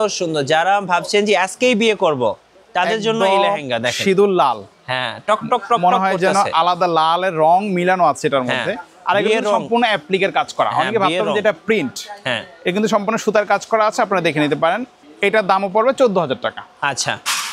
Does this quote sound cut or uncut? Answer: uncut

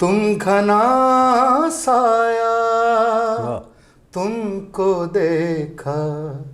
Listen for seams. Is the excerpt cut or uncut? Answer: uncut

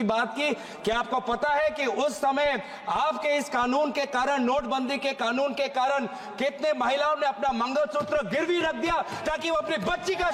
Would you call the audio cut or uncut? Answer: uncut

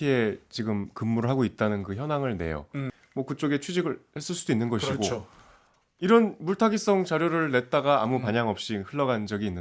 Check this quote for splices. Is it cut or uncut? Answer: cut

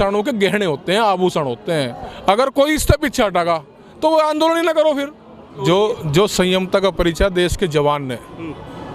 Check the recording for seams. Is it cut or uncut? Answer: cut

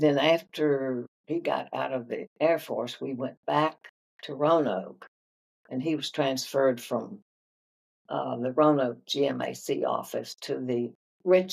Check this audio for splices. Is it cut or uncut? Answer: cut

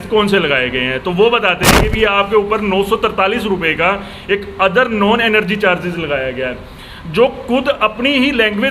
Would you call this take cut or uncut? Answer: uncut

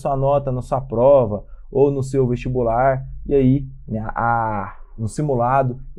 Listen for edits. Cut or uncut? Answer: uncut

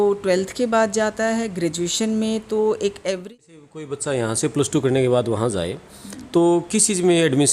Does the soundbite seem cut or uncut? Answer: cut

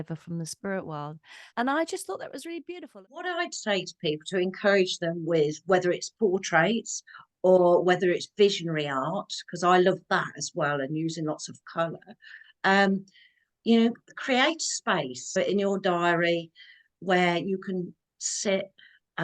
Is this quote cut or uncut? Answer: cut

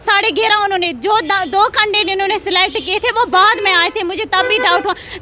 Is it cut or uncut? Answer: uncut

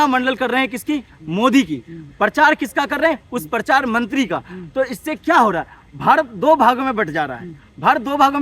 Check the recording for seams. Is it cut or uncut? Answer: uncut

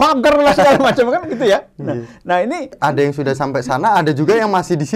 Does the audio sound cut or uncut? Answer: cut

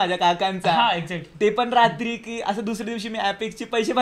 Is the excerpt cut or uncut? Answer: uncut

